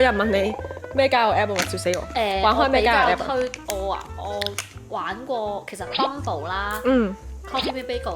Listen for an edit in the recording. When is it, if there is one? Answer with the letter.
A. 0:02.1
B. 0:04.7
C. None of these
C